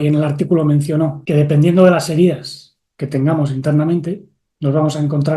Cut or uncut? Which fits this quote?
cut